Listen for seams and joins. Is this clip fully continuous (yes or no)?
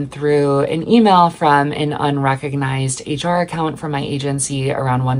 yes